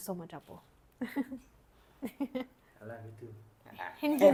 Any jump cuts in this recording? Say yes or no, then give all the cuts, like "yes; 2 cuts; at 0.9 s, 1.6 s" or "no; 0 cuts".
no; 0 cuts